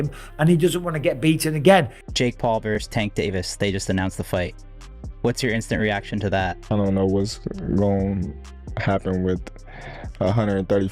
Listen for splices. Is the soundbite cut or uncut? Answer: cut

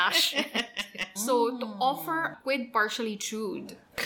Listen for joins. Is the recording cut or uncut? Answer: cut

